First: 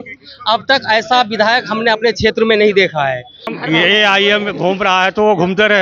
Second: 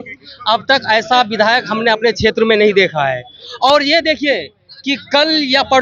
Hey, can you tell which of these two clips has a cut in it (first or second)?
first